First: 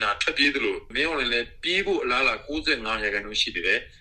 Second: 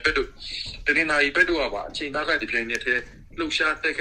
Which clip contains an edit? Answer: first; 1 cut; at 0.9 s

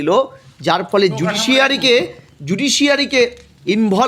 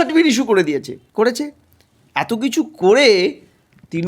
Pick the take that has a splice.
second; 1 cut; at 1.0 s

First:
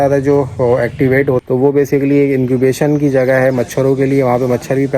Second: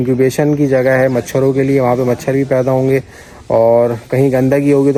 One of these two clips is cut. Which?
first; 1 cut; at 1.4 s

